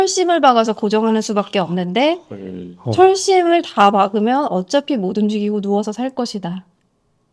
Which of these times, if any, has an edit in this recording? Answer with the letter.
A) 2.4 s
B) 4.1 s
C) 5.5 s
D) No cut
D